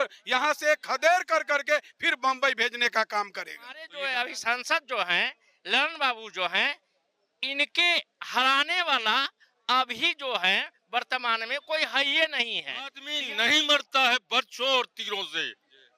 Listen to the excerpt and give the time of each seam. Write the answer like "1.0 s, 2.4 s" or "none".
3.9 s, 13.1 s